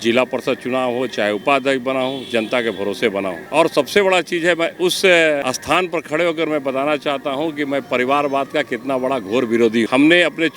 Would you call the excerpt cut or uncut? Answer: uncut